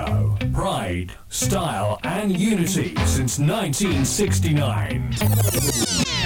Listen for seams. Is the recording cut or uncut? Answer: uncut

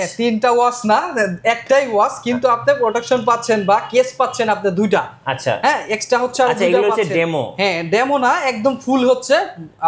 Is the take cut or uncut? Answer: uncut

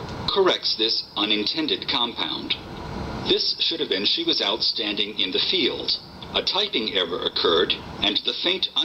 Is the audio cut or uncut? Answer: cut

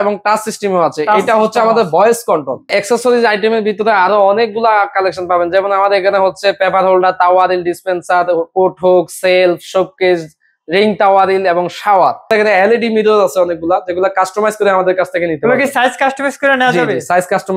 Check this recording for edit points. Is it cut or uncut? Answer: cut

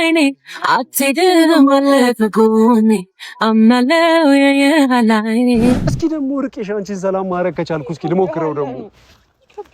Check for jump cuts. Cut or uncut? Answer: cut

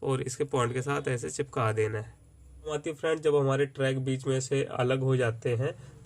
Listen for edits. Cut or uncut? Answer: cut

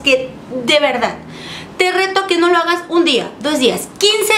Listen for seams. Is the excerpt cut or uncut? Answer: uncut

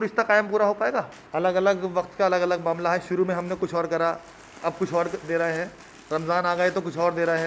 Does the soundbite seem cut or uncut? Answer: cut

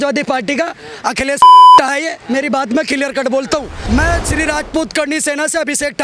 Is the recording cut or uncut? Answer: cut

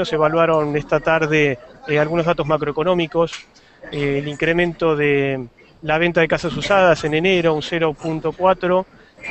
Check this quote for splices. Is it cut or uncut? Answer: cut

